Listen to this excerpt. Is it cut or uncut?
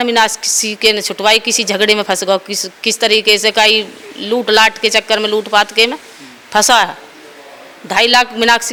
uncut